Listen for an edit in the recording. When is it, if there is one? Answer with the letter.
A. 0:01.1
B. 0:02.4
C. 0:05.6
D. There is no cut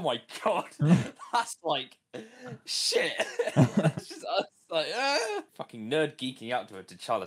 C